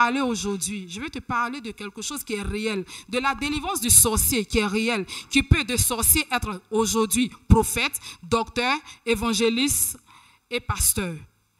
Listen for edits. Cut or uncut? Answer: uncut